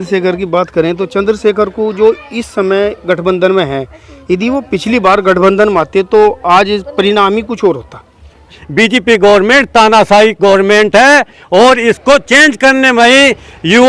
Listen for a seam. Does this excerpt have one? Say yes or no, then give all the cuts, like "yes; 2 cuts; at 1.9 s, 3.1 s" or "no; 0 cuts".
yes; 1 cut; at 8.6 s